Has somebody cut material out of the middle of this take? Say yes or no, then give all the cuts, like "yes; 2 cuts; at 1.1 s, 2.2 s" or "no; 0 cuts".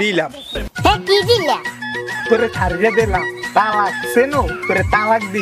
no; 0 cuts